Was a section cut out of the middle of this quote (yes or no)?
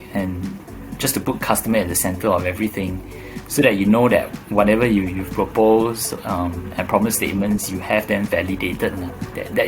no